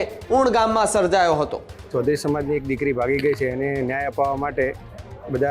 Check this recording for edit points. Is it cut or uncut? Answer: cut